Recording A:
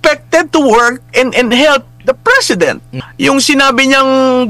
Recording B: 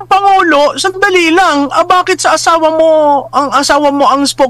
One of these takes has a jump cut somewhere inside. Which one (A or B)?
A